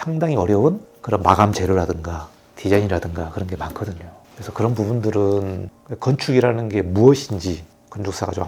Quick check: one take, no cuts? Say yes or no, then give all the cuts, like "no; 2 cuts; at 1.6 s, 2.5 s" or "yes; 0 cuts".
yes; 0 cuts